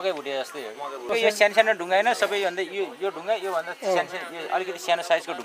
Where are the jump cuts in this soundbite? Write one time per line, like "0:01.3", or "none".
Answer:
0:01.0